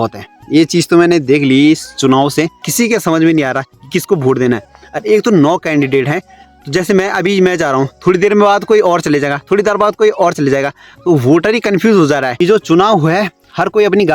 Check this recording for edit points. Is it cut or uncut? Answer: cut